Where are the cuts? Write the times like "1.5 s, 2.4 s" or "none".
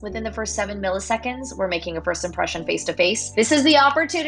3.2 s